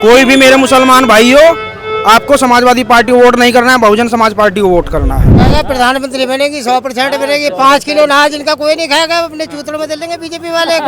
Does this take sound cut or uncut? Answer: cut